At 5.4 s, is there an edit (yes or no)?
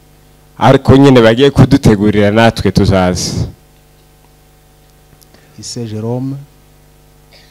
yes